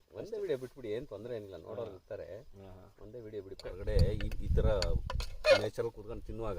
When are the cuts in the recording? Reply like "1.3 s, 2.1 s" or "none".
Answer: 3.5 s